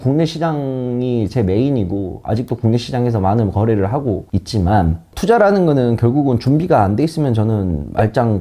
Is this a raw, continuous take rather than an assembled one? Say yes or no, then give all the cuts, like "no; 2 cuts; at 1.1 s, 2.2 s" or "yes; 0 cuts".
yes; 0 cuts